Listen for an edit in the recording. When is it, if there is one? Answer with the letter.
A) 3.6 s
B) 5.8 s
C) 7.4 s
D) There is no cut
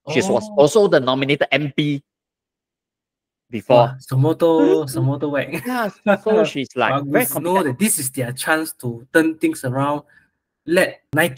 C